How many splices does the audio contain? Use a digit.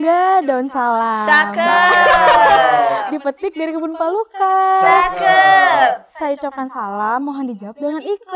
0